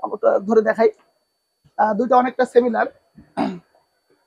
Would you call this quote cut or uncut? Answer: uncut